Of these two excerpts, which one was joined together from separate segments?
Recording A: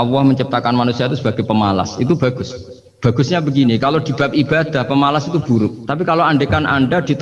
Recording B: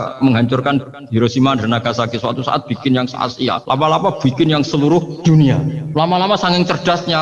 B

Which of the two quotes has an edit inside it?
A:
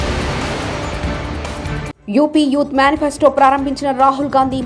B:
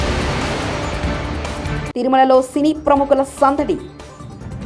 B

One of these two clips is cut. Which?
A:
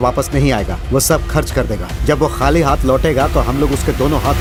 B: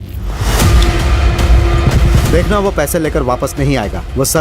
B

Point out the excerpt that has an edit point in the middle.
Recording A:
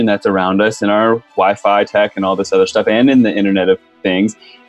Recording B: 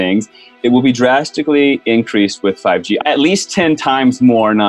B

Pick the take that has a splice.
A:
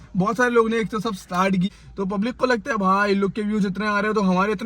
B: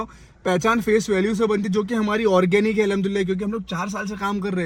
A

